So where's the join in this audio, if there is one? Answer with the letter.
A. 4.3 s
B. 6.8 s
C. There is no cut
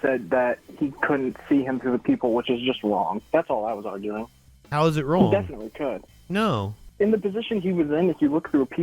B